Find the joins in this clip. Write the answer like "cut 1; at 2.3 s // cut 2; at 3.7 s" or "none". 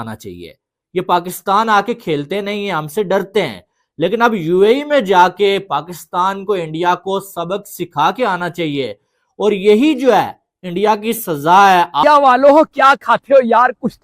cut 1; at 12.0 s